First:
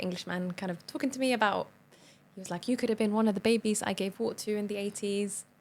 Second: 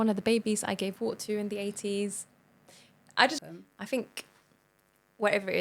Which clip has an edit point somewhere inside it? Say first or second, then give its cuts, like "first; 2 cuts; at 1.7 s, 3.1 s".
second; 1 cut; at 3.4 s